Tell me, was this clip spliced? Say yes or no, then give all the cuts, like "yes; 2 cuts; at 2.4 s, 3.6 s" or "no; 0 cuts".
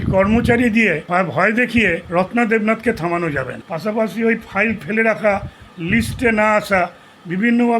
yes; 3 cuts; at 1.0 s, 2.0 s, 3.6 s